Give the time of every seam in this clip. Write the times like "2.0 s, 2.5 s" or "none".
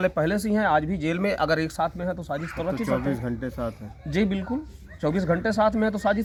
none